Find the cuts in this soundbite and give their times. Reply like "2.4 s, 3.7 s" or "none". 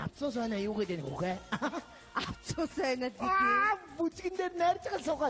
2.4 s